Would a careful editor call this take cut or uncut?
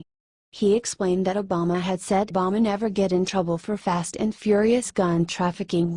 uncut